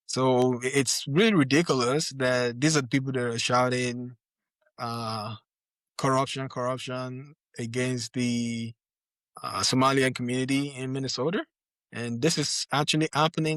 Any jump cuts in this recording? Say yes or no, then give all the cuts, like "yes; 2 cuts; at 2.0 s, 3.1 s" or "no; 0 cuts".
no; 0 cuts